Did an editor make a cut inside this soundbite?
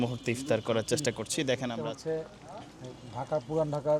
yes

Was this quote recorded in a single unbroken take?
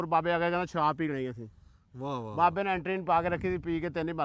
yes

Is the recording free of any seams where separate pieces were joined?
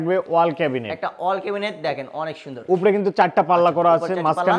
yes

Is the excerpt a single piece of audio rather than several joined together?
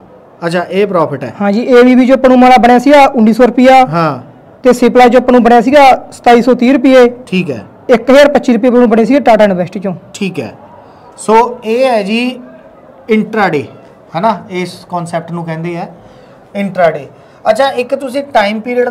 yes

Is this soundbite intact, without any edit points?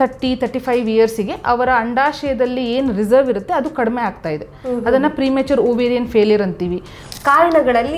no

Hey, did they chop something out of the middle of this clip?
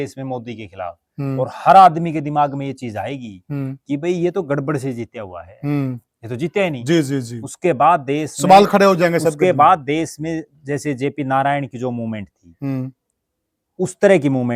no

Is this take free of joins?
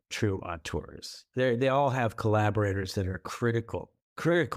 yes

